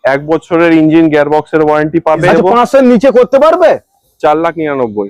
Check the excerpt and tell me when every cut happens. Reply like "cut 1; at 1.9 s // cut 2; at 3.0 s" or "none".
cut 1; at 2.2 s